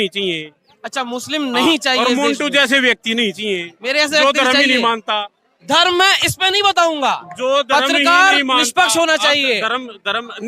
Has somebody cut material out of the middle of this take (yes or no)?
no